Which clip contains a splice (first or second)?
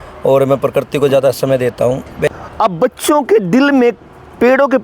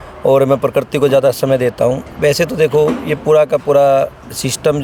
first